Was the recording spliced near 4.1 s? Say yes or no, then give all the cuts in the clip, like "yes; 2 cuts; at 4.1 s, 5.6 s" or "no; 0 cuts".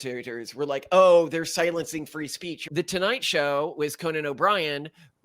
no; 1 cut; at 2.7 s